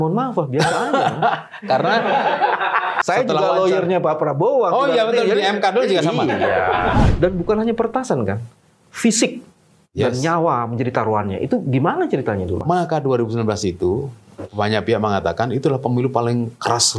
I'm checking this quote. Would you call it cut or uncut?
cut